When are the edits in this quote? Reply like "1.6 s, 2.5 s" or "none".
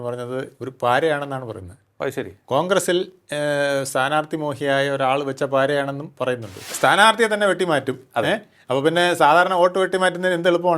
6.6 s